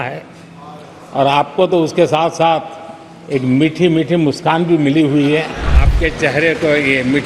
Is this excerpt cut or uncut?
cut